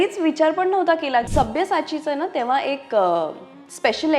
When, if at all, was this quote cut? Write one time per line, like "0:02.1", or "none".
0:01.3